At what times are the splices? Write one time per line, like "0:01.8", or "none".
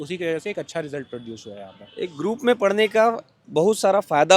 none